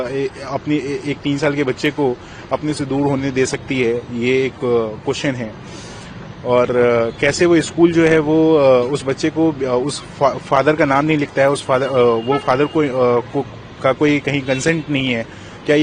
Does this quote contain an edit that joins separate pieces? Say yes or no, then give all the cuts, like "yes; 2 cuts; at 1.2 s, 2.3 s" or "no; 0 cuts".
no; 0 cuts